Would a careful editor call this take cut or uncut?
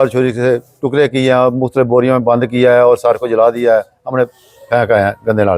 uncut